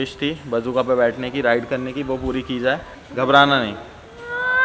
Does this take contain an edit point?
yes; 1 cut; at 3.0 s

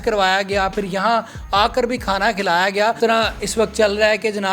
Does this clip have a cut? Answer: yes; 1 cut; at 3.0 s

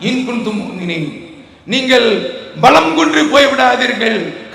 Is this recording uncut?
yes; 0 cuts

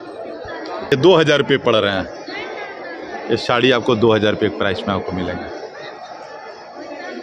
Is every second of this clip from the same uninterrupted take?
yes; 0 cuts

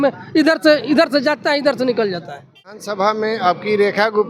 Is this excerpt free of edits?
no; 1 cut; at 2.7 s

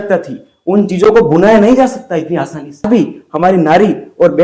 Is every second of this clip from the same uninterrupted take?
no; 1 cut; at 2.8 s

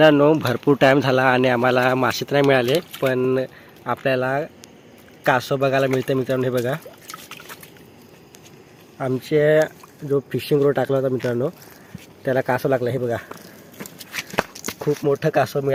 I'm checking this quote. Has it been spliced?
no; 0 cuts

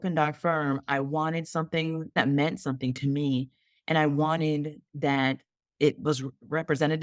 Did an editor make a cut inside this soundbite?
yes; 1 cut; at 2.2 s

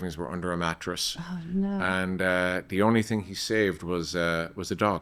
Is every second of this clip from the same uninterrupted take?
yes; 0 cuts

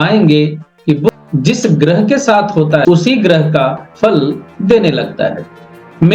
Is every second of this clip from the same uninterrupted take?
no; 2 cuts; at 1.1 s, 2.8 s

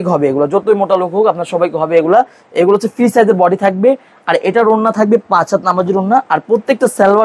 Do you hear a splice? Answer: no; 0 cuts

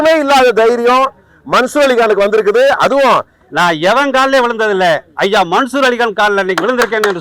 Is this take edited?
yes; 1 cut; at 3.4 s

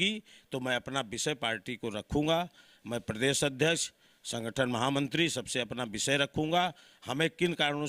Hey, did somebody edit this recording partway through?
no; 0 cuts

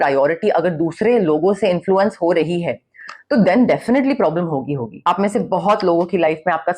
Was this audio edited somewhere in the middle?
yes; 1 cut; at 5.0 s

